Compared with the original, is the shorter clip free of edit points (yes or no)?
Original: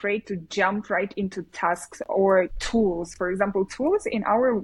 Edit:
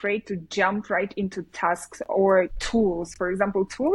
yes